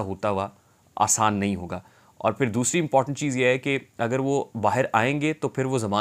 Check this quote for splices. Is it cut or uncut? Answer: uncut